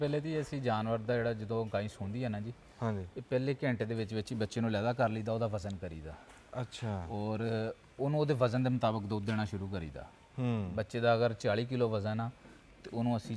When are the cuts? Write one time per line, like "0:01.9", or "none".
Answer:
none

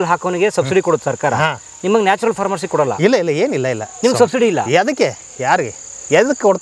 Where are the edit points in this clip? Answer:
none

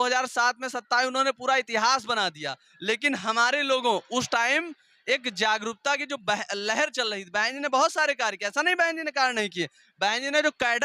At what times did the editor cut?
none

